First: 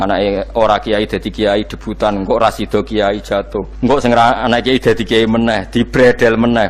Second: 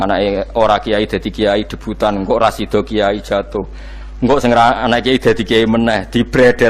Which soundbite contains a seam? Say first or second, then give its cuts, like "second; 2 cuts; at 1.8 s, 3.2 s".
first; 1 cut; at 3.7 s